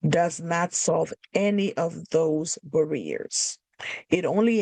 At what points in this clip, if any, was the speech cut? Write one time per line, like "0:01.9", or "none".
none